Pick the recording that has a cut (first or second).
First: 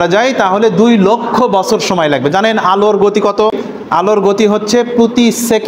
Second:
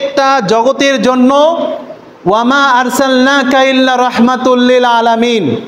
first